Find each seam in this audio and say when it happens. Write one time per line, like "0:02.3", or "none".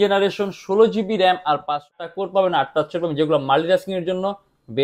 0:02.0